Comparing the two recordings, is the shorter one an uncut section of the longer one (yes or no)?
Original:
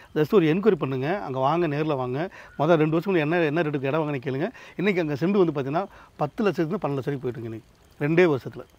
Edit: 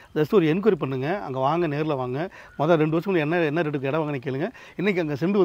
yes